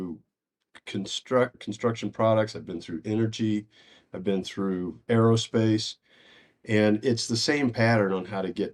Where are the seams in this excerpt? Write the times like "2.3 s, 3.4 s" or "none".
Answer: 1.5 s, 5.0 s